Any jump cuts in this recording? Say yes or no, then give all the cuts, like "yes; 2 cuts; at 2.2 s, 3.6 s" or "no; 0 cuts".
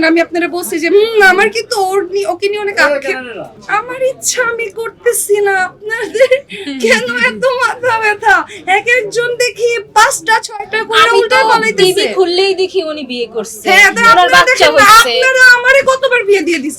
no; 0 cuts